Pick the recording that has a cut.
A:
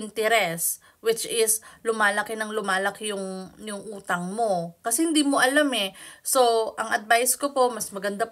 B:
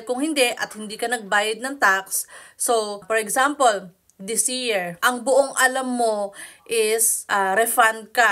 B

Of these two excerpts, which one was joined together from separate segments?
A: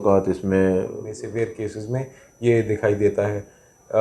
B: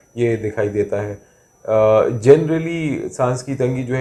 A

